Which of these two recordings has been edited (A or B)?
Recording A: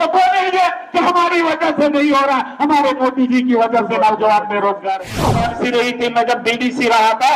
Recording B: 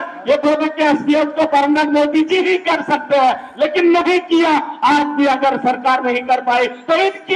A